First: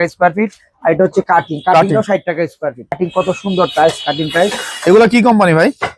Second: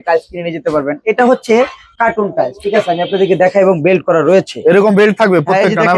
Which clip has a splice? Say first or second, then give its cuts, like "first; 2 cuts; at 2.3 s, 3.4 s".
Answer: first; 1 cut; at 3.0 s